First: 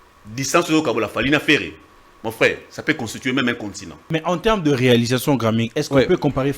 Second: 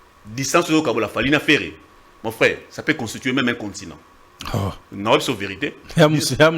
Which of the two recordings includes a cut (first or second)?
first